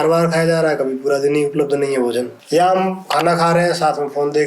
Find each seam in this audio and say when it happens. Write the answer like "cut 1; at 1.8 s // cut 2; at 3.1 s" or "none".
cut 1; at 2.4 s